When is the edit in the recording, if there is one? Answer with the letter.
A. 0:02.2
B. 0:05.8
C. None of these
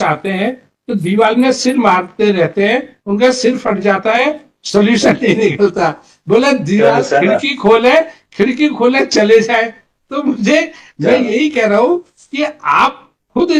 C